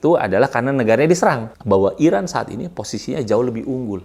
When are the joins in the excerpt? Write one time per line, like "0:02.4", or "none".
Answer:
0:01.5

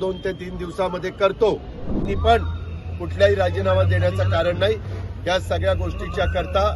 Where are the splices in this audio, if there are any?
0:02.1

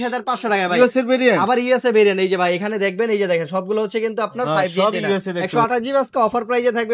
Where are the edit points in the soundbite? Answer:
0:05.4

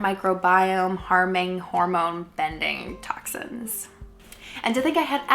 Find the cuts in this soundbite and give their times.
0:04.1

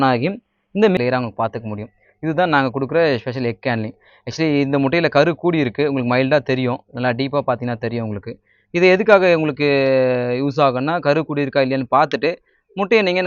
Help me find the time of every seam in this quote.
0:01.0

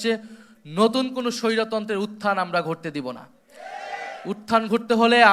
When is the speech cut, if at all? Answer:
none

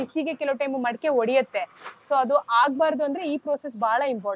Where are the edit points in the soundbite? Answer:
none

